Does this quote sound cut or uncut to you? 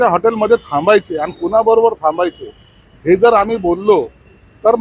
uncut